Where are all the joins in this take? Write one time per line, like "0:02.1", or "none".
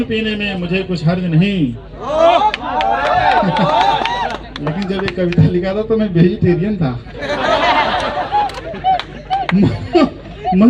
none